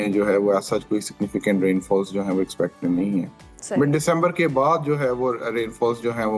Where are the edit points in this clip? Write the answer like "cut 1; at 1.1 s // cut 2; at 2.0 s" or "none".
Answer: none